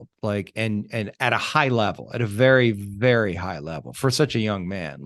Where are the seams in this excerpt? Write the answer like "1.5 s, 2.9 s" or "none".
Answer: none